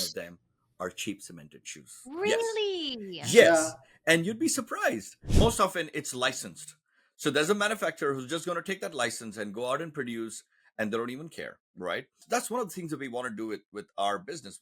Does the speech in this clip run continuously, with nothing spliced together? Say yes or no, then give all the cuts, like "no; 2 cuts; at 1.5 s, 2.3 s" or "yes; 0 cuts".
no; 2 cuts; at 5.3 s, 12.2 s